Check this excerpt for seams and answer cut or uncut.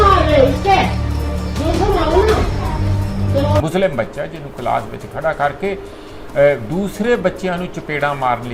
cut